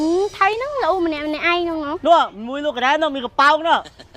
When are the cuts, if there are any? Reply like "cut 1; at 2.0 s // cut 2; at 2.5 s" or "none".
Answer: none